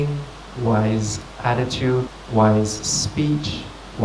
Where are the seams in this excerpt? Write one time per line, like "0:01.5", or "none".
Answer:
0:02.1

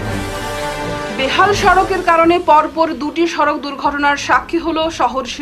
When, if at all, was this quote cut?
0:01.0

